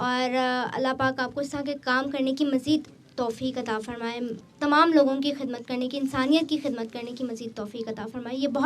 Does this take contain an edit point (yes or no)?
yes